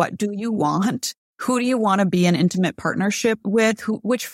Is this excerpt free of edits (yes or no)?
no